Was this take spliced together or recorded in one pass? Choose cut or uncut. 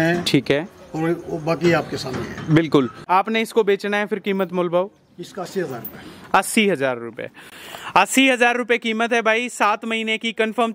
cut